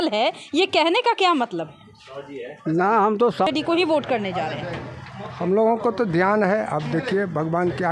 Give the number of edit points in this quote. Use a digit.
1